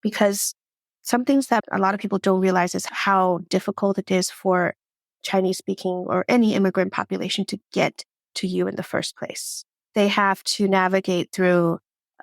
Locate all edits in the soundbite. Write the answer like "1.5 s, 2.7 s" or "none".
2.9 s